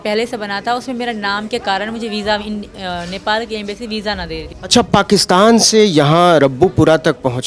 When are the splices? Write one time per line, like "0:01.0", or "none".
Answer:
0:04.5